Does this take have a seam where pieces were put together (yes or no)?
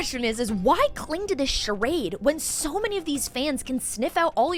no